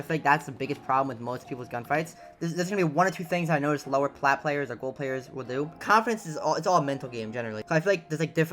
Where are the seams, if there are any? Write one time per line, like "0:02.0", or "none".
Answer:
0:02.2
0:05.8
0:07.6